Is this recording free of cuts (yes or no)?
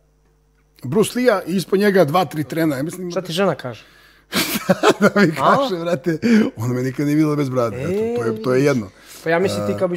no